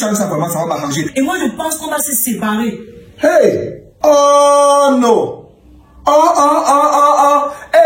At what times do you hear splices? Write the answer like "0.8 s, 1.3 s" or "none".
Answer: 1.1 s, 3.8 s